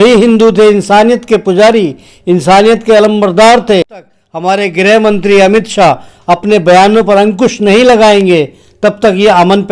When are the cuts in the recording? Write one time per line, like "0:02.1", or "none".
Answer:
0:04.2